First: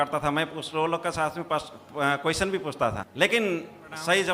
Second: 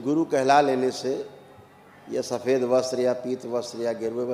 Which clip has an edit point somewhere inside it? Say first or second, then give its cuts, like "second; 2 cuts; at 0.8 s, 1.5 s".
first; 1 cut; at 3.0 s